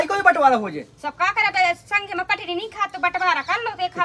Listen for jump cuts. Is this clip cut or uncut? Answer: uncut